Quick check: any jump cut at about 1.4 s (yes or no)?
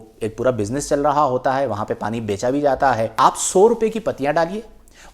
no